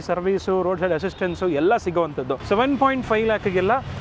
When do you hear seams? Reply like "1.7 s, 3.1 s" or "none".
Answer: 2.4 s

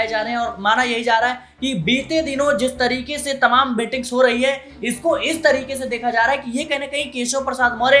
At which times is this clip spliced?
none

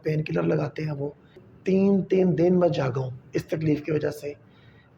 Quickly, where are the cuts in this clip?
1.4 s

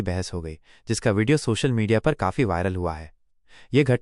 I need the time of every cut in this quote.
none

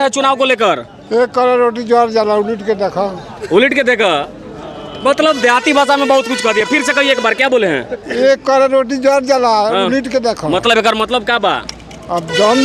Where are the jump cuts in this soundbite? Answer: none

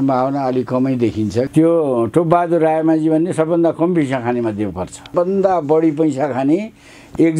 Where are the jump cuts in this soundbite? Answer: 1.5 s, 5.1 s

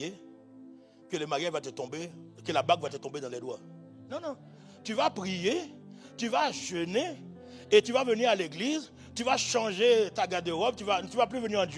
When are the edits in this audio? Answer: none

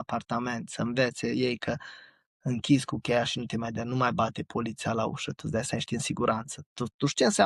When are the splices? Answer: none

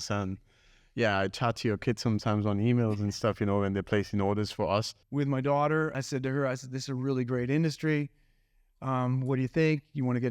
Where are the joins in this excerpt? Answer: 5.0 s, 6.0 s

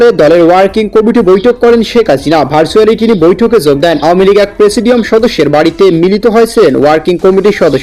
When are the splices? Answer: 4.2 s

